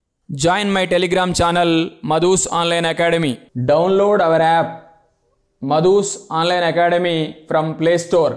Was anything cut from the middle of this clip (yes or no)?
yes